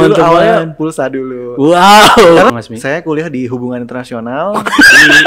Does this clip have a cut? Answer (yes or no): yes